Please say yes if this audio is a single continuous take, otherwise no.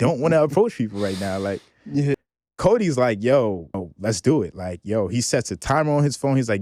no